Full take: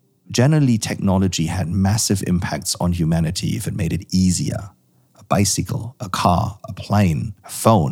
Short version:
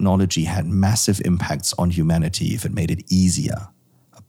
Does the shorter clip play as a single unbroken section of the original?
yes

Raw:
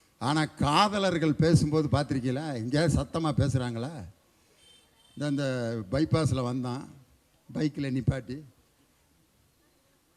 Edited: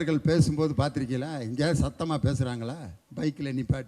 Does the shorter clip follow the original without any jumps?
no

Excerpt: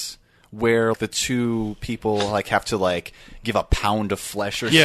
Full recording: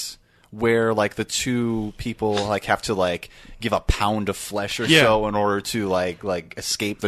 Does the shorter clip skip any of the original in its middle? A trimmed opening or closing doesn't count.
yes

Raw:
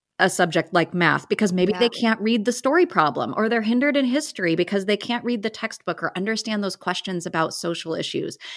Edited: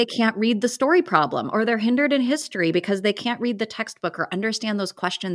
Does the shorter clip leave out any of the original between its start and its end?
no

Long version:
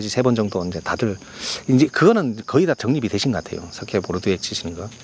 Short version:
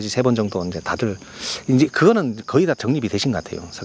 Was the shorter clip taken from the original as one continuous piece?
yes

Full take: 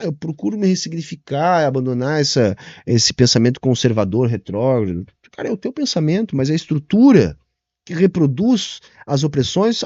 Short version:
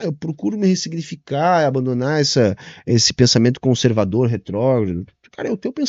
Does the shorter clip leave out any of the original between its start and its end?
no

